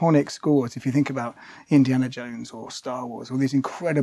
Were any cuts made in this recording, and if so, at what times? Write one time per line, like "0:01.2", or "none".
none